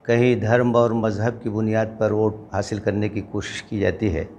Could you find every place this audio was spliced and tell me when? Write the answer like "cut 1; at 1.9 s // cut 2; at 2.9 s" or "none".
none

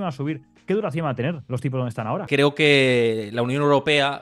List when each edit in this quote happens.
cut 1; at 2.3 s

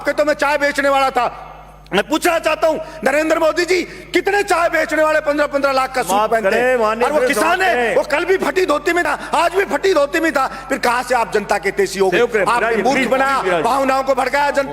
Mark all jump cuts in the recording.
none

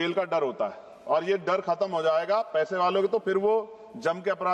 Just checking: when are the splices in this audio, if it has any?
none

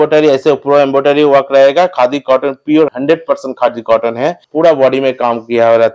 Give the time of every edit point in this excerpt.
cut 1; at 2.9 s // cut 2; at 4.4 s

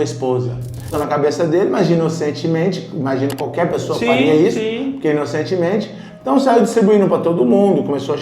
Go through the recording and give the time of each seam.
cut 1; at 0.9 s

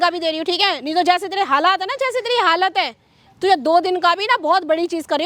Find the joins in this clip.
none

